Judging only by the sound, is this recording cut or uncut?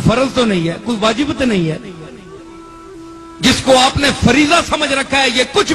uncut